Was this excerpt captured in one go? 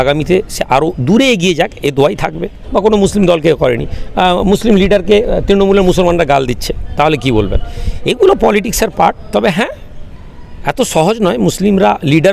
no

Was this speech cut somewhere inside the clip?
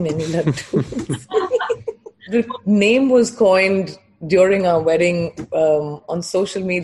yes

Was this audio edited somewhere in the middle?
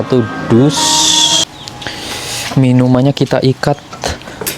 yes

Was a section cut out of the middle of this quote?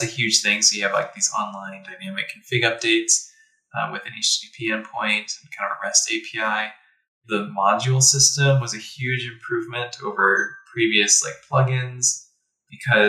no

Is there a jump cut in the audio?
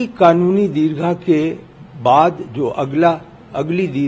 no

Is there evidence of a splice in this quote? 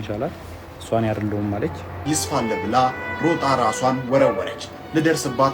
yes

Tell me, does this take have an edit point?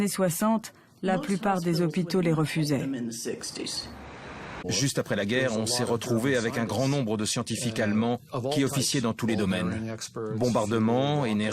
yes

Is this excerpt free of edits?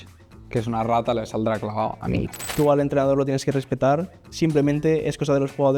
no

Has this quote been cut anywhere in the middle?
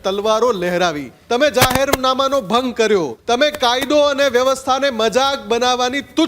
yes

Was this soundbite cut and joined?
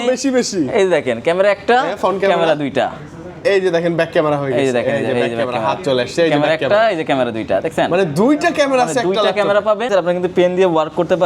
yes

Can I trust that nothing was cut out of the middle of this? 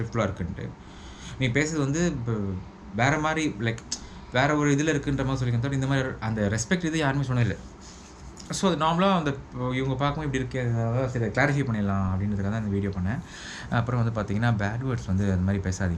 yes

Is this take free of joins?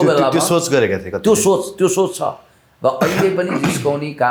yes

